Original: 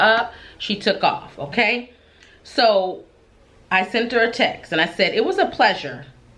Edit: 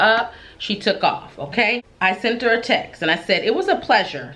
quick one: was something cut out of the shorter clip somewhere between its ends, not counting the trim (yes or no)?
yes